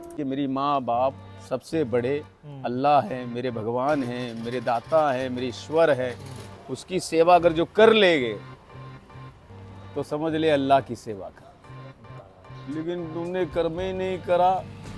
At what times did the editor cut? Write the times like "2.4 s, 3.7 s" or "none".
none

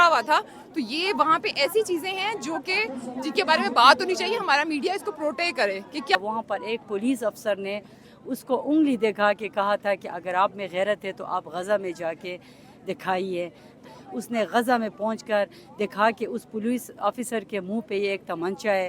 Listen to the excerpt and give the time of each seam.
6.2 s, 13.8 s

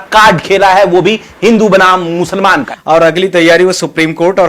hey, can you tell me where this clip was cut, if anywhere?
2.7 s

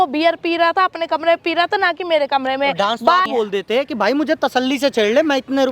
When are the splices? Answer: 3.3 s

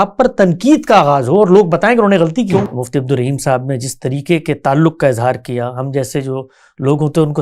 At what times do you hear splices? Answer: 2.7 s

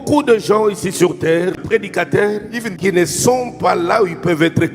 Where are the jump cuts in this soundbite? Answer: 1.5 s, 2.7 s

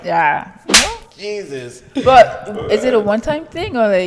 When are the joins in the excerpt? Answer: none

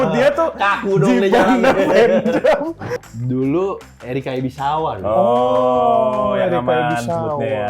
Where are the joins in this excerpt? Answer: 2.9 s

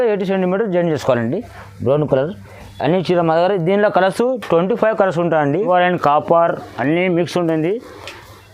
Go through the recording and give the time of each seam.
5.6 s

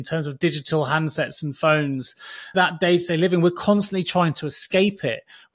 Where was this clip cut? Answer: 2.5 s

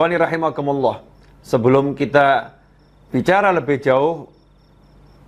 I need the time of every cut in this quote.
none

